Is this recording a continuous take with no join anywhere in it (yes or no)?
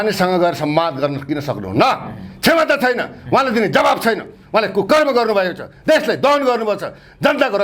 yes